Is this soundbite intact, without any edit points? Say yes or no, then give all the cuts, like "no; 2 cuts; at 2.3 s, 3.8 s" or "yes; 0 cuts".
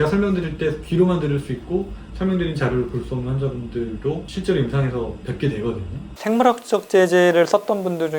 no; 2 cuts; at 4.3 s, 6.0 s